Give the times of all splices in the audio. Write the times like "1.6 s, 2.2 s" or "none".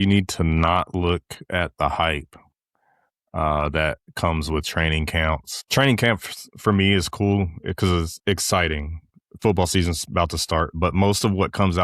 5.5 s